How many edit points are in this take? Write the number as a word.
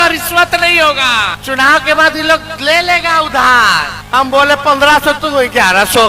two